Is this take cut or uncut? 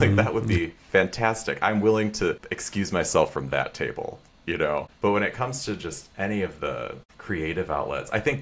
cut